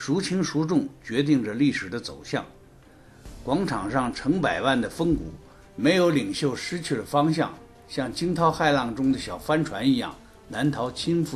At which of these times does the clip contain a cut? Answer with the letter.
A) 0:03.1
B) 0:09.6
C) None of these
B